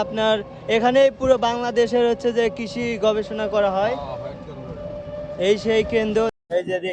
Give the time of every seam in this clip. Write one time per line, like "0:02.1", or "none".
none